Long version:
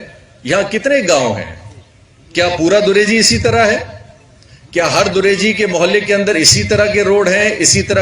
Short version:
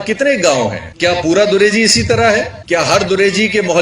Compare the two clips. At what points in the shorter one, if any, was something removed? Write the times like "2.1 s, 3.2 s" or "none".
0.9 s, 2.6 s